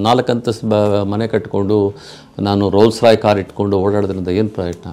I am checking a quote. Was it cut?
no; 0 cuts

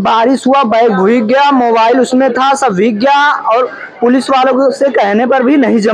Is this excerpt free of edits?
yes; 0 cuts

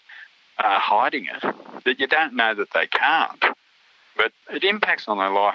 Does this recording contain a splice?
no; 0 cuts

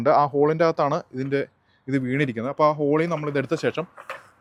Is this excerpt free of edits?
yes; 0 cuts

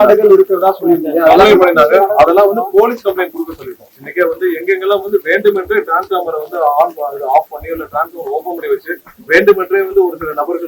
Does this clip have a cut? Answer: no; 0 cuts

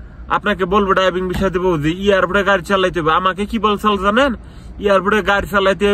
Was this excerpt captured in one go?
yes; 0 cuts

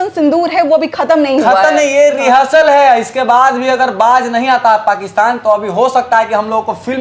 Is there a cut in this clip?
no; 0 cuts

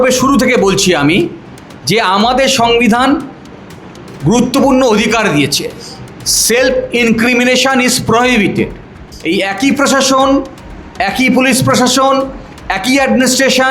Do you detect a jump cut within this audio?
yes; 1 cut; at 9.1 s

